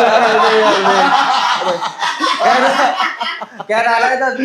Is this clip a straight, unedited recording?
yes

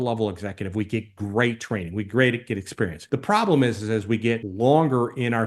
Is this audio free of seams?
no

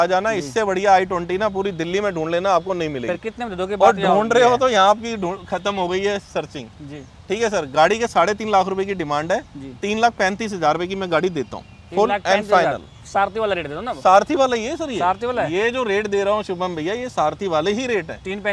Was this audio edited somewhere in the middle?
no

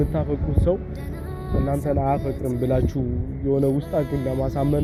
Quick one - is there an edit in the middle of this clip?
no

